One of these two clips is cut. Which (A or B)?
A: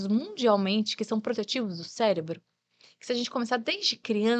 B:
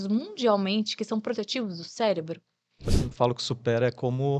B